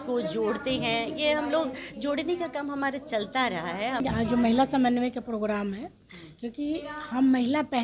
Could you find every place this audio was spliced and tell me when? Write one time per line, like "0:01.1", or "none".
0:04.0